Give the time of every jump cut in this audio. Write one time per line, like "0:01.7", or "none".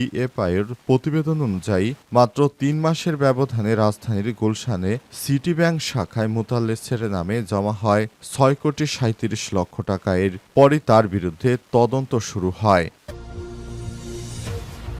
0:13.1